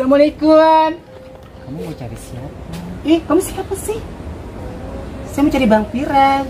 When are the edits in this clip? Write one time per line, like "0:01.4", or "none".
0:01.2